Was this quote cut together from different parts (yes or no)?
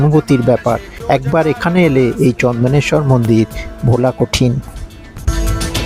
yes